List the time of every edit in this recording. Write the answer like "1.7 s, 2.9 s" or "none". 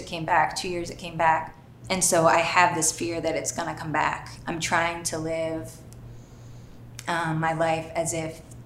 1.7 s, 4.3 s